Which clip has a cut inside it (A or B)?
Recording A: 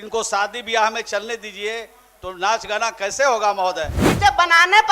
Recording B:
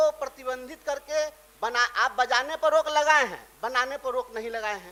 A